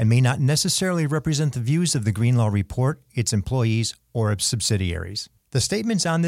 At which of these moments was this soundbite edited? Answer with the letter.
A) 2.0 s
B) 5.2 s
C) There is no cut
C